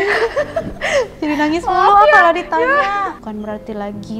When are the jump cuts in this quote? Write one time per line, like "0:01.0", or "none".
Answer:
0:03.2